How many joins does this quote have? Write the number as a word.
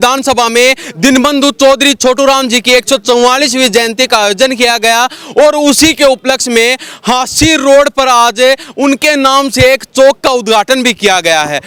zero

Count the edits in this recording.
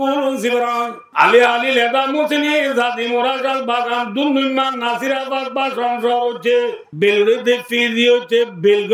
two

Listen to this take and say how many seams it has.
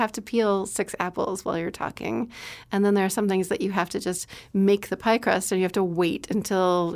zero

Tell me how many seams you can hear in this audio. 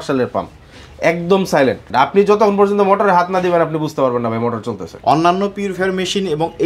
two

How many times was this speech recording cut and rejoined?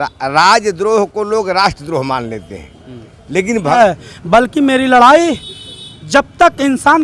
one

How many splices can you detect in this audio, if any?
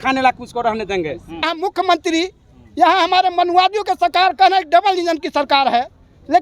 one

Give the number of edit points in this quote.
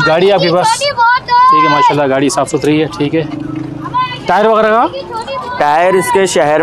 zero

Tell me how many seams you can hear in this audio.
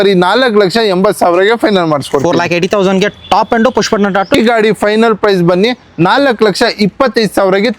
one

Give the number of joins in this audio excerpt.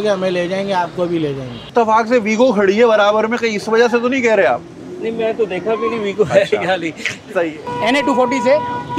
two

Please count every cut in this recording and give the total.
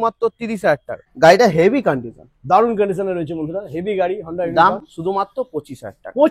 one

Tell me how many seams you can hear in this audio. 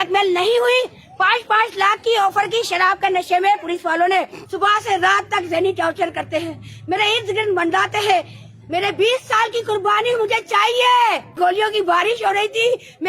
two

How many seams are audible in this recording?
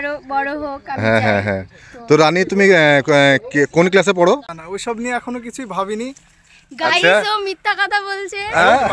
one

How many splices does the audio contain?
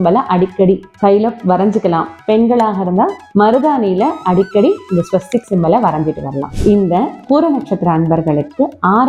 zero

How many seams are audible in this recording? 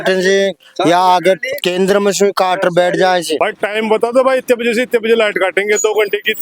one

